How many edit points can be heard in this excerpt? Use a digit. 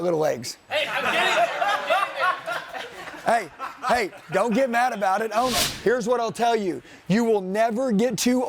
1